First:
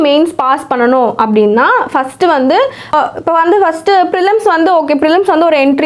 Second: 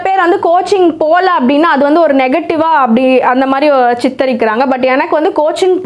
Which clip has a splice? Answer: first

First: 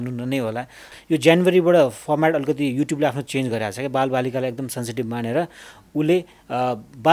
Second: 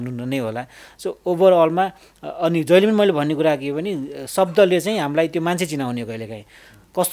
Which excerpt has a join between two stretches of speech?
first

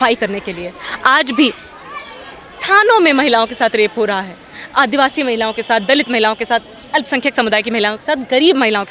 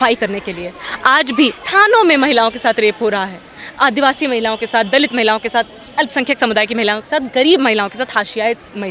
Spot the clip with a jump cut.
second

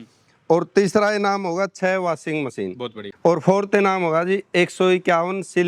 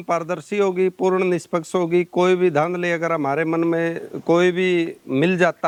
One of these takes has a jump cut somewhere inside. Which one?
first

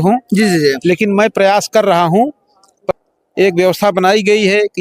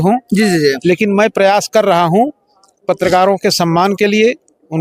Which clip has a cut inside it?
first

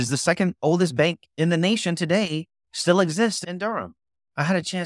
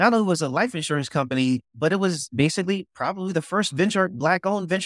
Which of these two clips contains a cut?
first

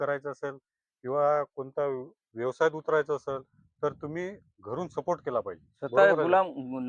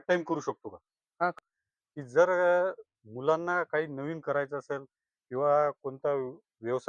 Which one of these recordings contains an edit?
second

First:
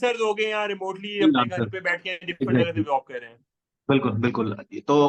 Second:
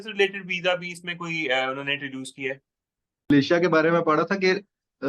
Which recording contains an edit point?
second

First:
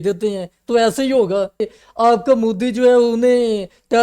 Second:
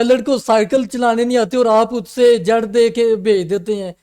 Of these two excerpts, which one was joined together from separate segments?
first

